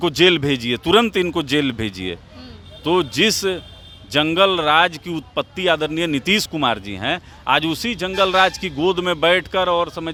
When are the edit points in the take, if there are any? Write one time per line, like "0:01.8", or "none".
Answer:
none